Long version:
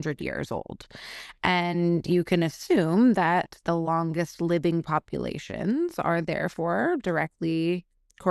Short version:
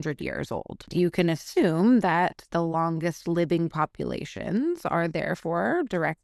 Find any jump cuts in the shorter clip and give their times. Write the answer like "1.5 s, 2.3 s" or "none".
0.9 s

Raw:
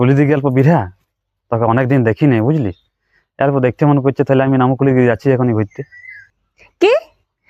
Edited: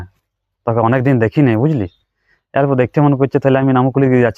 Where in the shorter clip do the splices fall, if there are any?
none

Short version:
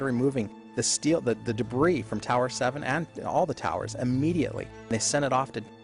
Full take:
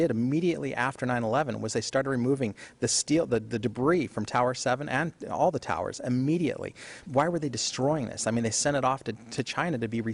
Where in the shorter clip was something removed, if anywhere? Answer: 4.9 s

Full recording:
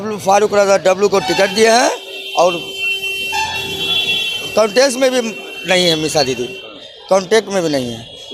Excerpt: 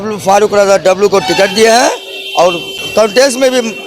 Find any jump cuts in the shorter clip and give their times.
2.7 s

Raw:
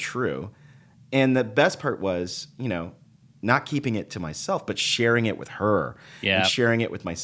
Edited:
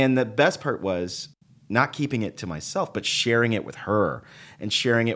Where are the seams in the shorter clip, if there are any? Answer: 1.3 s

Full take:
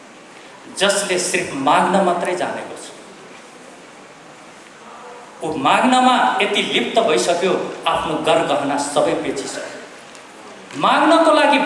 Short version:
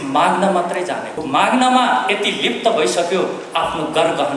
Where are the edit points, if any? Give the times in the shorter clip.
1.1 s

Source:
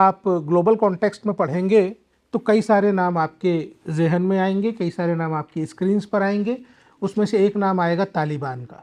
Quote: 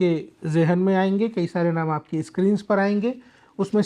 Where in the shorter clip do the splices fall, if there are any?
none

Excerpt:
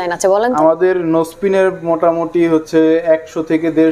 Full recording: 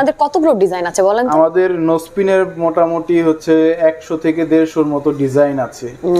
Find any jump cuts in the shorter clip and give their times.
none

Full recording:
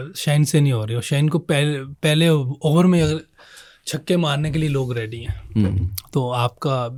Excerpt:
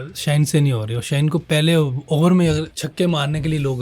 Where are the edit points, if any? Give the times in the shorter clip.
1.4 s, 2.8 s

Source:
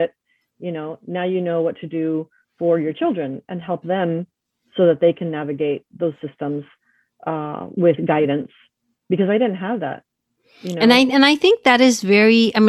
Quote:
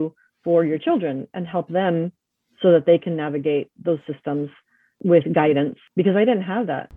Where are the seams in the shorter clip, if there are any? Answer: 4.9 s, 5.8 s

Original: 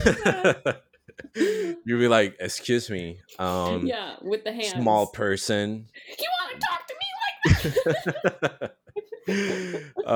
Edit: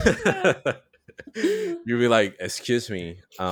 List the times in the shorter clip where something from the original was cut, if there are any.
none

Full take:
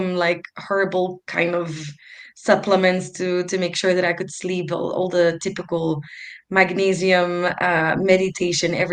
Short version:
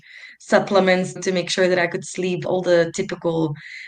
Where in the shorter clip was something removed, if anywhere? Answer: 1.2 s, 2.4 s

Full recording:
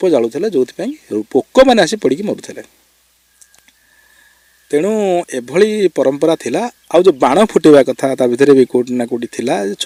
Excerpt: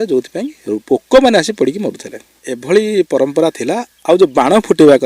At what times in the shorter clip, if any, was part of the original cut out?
2.5 s

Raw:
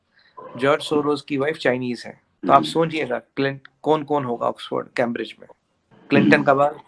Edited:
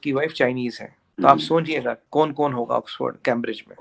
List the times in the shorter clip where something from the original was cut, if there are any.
2.0 s

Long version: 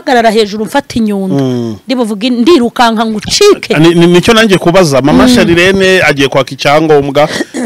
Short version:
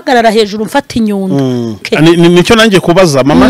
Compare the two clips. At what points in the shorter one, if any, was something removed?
1.8 s

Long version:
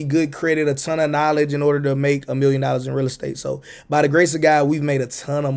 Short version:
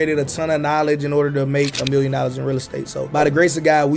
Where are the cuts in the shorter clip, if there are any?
3.0 s

